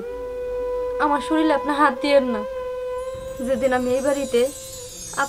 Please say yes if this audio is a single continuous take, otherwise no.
no